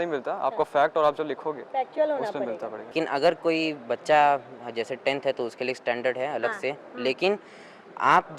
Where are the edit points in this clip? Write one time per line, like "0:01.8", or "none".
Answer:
0:02.9